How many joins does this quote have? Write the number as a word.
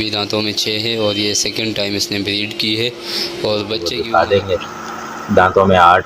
one